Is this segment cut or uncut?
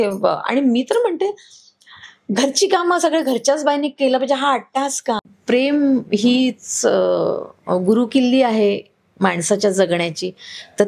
cut